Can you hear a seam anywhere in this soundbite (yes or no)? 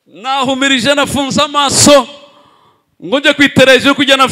no